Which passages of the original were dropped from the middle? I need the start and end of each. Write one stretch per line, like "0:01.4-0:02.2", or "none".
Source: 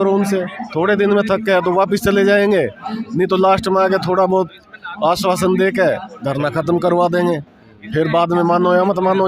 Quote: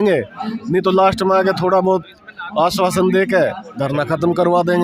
none